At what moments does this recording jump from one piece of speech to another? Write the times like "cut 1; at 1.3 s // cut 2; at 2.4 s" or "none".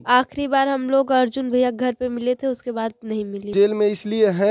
cut 1; at 3.5 s